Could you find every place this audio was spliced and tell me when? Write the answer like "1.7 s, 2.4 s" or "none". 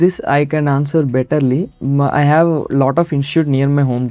none